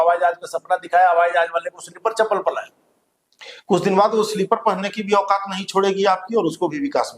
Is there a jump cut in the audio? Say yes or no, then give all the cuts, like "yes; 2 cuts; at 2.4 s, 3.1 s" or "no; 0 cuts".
no; 0 cuts